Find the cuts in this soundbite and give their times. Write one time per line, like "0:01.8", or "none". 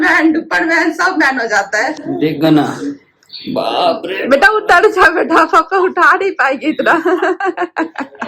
0:02.0